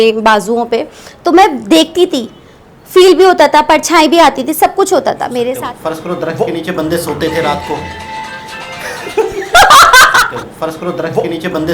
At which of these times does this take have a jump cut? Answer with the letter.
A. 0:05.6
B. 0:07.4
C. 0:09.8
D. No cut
A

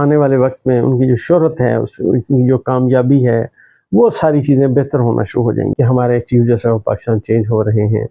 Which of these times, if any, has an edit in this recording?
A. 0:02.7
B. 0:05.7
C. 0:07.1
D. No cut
B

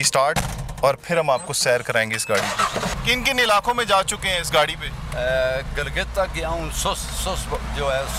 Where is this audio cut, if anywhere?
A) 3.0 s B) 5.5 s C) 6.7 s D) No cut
A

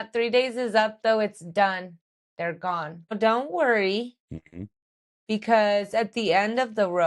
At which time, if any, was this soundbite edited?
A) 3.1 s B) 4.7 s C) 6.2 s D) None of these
A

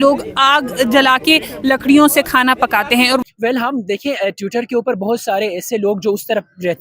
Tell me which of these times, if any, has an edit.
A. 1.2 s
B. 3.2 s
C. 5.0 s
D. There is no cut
B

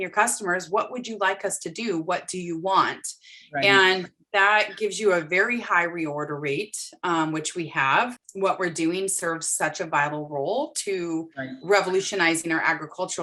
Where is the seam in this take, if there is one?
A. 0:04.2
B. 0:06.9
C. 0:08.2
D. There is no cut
C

